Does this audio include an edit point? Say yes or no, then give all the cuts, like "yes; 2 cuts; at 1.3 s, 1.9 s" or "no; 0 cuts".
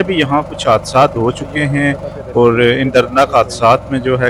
no; 0 cuts